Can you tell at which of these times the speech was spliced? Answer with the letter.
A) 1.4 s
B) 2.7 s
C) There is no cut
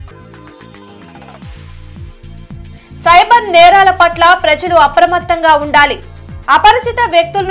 C